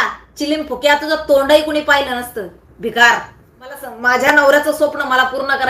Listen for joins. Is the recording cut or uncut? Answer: cut